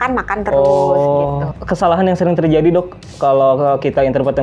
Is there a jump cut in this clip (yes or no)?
yes